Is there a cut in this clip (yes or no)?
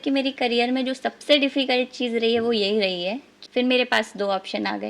yes